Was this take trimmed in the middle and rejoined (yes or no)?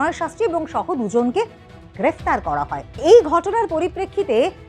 yes